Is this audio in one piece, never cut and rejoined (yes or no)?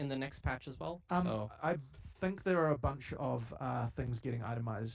yes